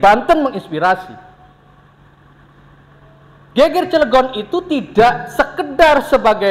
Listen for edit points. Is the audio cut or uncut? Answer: uncut